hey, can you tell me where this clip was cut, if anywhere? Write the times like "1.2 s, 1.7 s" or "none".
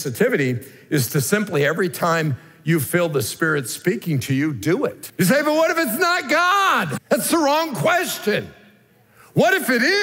5.0 s, 7.0 s